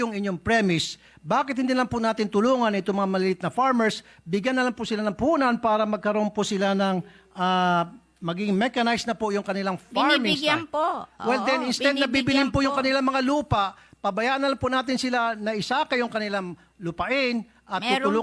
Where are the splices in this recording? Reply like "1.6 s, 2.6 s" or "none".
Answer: none